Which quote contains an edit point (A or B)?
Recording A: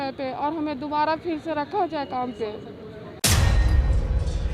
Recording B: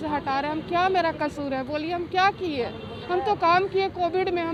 A